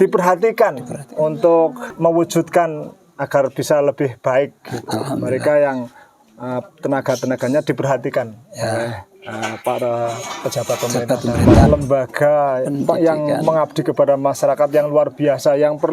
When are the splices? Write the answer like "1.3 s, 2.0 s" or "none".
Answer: 1.9 s, 11.7 s